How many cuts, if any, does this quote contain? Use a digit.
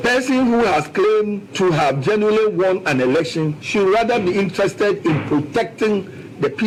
0